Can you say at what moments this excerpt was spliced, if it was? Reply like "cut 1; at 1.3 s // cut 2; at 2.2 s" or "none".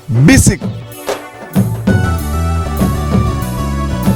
none